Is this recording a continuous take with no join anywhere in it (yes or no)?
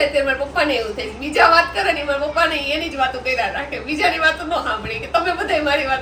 yes